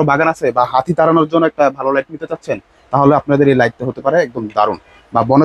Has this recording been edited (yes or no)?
no